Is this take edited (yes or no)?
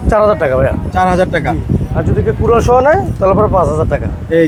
no